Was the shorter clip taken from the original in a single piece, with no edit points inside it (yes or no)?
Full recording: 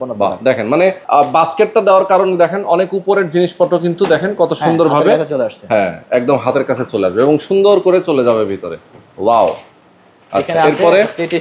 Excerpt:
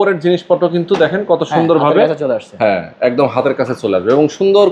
yes